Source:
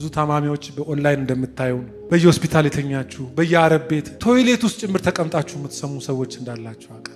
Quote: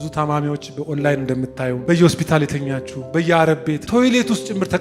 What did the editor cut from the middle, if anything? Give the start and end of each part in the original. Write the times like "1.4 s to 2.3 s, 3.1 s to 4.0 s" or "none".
1.8 s to 2.0 s, 4.1 s to 4.2 s